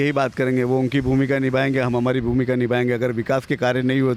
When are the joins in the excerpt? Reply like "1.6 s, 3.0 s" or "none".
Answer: none